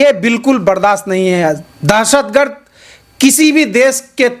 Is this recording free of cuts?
yes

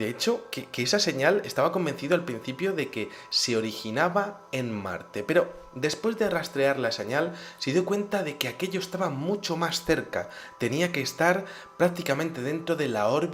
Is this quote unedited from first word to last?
yes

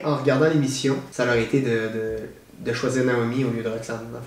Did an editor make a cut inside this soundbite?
yes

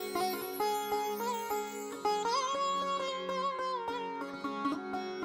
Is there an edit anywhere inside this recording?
no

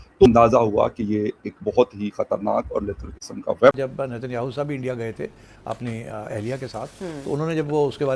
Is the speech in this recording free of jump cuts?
no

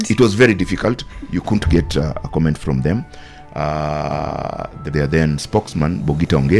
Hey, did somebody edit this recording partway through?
yes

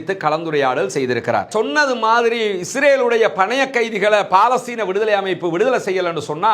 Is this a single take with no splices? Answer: no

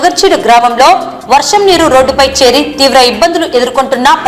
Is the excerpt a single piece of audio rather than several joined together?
yes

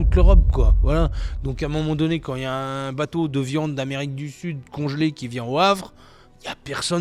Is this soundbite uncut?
yes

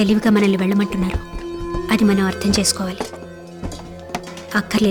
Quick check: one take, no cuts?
yes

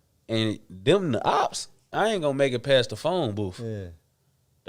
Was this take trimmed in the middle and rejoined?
yes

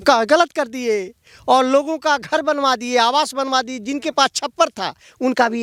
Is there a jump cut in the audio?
no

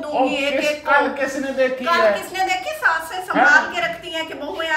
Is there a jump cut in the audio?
no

